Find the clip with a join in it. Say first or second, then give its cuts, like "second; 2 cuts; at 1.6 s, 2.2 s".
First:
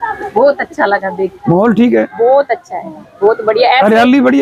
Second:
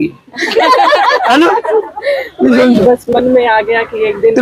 second; 1 cut; at 2.8 s